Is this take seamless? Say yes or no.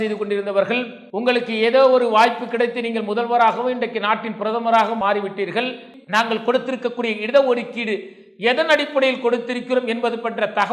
no